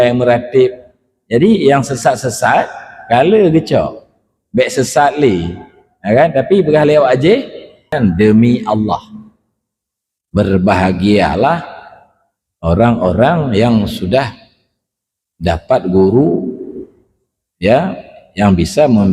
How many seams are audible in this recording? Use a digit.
1